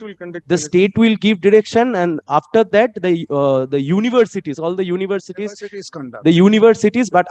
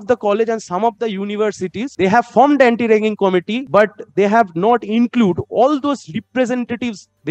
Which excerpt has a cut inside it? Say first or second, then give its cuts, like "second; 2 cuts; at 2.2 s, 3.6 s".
second; 2 cuts; at 1.9 s, 3.6 s